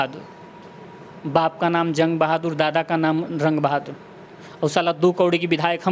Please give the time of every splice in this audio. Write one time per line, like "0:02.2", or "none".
none